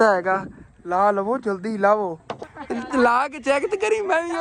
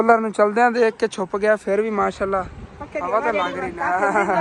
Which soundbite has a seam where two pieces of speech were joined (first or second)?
first